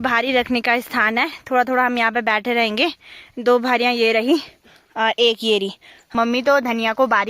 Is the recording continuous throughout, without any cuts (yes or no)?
no